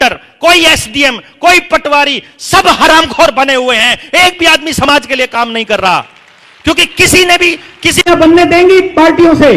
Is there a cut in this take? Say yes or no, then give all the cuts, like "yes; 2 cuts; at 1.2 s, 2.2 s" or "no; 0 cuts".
yes; 1 cut; at 8.0 s